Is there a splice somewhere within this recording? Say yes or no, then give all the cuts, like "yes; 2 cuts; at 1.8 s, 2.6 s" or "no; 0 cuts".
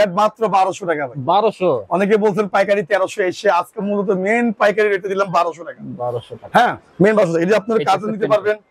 no; 0 cuts